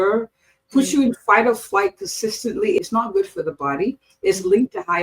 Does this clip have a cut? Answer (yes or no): yes